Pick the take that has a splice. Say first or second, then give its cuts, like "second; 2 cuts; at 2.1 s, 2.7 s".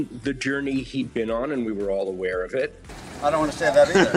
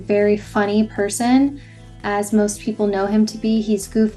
first; 1 cut; at 3.0 s